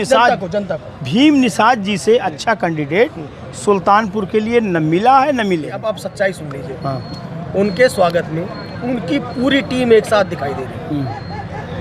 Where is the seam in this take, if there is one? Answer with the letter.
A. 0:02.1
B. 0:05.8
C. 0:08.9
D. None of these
B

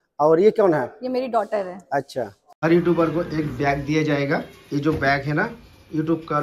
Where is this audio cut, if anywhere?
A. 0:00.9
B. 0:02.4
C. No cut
B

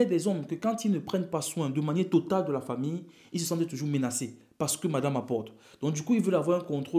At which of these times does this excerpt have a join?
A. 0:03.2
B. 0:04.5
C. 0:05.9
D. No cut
D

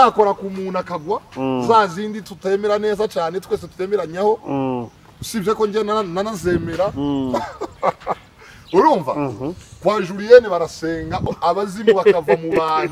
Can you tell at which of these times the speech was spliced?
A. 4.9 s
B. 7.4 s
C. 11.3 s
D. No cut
C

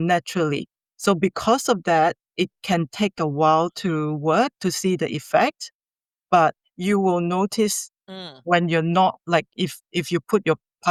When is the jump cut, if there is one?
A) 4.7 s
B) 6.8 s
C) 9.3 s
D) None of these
D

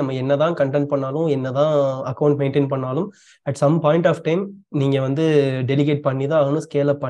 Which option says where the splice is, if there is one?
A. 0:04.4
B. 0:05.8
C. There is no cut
C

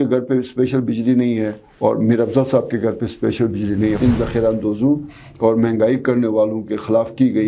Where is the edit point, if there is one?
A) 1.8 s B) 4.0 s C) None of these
B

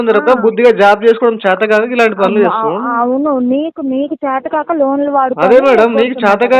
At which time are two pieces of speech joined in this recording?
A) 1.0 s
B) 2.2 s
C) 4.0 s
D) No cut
D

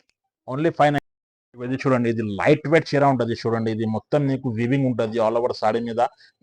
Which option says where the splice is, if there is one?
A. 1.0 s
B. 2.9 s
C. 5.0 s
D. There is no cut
A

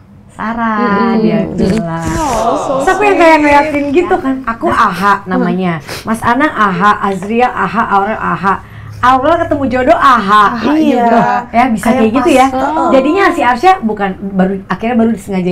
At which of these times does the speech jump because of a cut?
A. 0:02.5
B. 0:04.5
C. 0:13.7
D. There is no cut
B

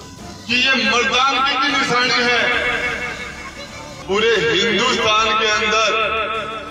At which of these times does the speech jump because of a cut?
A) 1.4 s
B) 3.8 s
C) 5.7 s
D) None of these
B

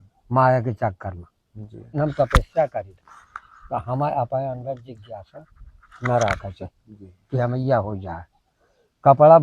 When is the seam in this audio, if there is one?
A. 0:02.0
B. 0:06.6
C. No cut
A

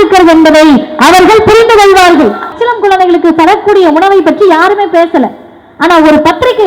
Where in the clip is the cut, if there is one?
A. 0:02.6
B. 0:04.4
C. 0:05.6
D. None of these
A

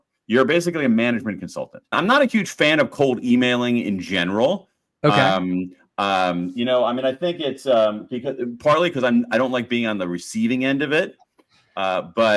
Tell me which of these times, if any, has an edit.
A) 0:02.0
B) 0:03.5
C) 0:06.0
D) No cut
A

